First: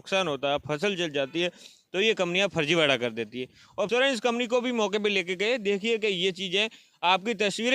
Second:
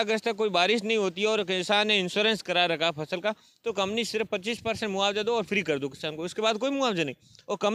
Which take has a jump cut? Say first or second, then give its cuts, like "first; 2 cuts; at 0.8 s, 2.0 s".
first; 1 cut; at 3.9 s